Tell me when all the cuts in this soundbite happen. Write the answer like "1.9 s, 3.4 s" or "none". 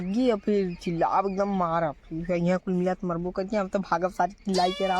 none